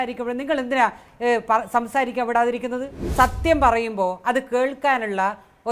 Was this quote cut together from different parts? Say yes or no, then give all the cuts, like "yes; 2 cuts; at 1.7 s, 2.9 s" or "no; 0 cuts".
yes; 1 cut; at 3.1 s